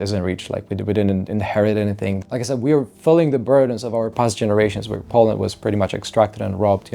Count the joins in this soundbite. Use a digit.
1